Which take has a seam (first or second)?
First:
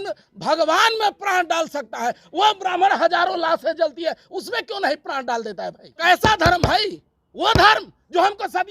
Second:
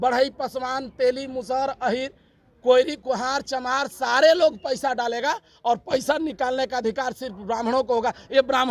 first